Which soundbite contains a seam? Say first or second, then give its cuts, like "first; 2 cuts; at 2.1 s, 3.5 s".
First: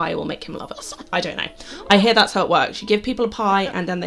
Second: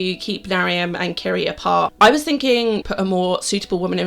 second; 2 cuts; at 1.9 s, 2.8 s